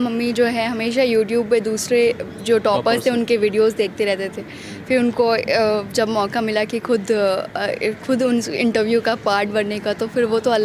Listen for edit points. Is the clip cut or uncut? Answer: uncut